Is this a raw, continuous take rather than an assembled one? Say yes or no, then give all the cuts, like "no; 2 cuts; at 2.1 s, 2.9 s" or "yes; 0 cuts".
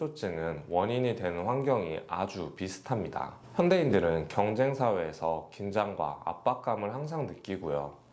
yes; 0 cuts